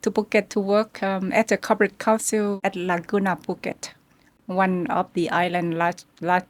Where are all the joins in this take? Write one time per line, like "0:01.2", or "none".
none